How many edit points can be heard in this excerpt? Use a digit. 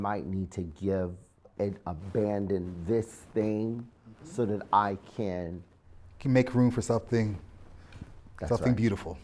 1